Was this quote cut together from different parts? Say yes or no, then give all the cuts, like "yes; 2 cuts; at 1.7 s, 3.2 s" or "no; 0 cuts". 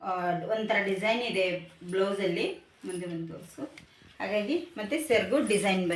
no; 0 cuts